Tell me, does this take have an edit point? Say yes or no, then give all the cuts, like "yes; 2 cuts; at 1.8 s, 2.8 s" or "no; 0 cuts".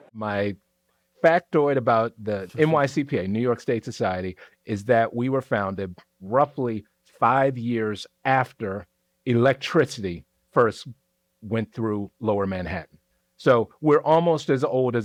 no; 0 cuts